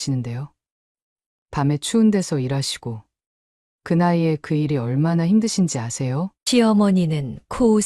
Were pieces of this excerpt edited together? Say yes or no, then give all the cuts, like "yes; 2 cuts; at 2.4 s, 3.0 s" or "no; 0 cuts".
no; 0 cuts